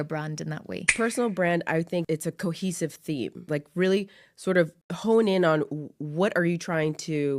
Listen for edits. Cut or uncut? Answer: cut